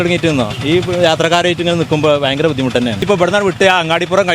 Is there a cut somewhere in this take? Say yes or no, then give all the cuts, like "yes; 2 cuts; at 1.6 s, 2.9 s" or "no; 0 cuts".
yes; 1 cut; at 3.0 s